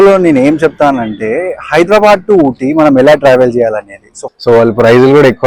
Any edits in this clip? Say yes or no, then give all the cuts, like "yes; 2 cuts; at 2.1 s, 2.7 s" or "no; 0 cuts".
yes; 1 cut; at 4.3 s